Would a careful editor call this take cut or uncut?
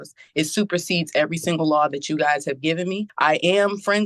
cut